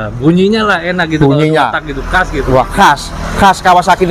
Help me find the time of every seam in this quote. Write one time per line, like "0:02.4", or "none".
none